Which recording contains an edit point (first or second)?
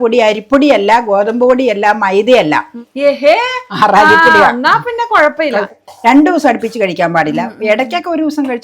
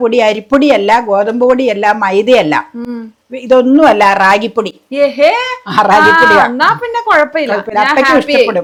first